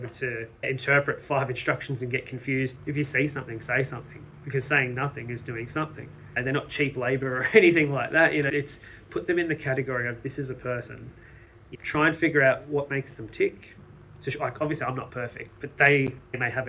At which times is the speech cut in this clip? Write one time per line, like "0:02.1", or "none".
0:02.7
0:06.4
0:13.7